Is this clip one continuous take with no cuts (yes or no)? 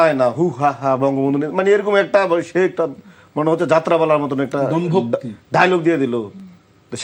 yes